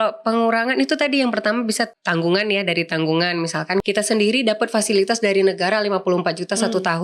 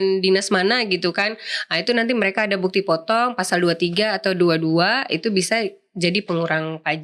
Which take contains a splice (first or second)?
first